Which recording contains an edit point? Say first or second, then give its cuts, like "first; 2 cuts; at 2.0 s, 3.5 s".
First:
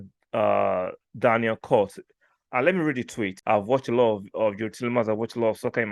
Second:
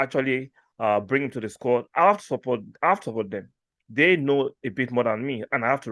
first; 1 cut; at 3.4 s